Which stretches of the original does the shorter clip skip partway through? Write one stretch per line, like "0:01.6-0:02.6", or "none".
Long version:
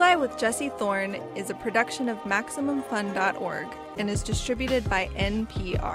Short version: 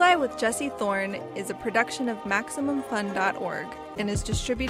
none